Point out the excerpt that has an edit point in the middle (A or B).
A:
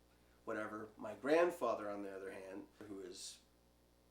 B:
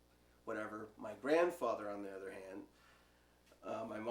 A